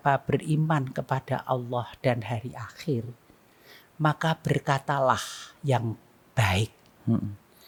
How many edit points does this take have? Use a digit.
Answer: 0